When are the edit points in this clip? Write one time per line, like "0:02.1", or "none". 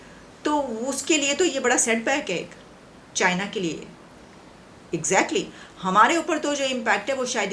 none